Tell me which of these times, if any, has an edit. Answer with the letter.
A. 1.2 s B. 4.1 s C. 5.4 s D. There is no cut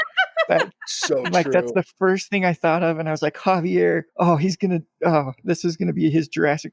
B